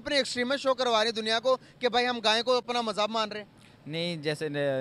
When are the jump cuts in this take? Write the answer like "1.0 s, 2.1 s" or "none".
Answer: none